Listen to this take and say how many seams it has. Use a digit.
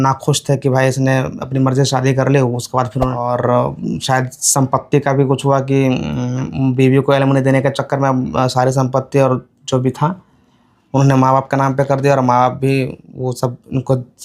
1